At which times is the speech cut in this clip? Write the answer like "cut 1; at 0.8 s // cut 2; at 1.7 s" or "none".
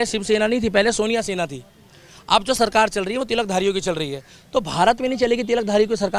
none